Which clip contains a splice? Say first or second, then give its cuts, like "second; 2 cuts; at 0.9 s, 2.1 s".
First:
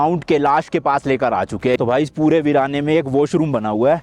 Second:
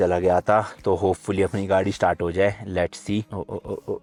first; 1 cut; at 1.8 s